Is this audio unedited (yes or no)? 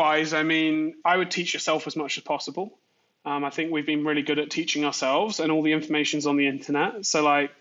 no